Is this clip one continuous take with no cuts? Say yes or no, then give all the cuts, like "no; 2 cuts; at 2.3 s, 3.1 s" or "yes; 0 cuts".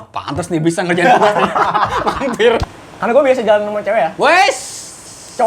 no; 1 cut; at 2.6 s